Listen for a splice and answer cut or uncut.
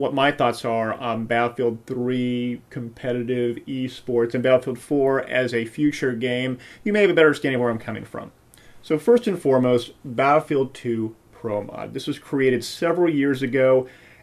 cut